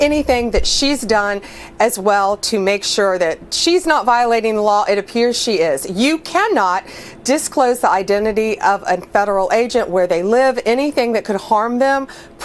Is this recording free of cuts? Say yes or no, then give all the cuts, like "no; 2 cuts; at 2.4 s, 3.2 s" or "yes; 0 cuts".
yes; 0 cuts